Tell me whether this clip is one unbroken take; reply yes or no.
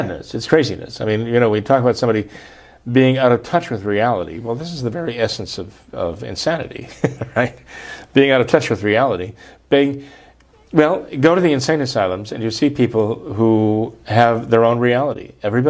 yes